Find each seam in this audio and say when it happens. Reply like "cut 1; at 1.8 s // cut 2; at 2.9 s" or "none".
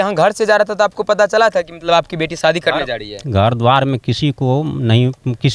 none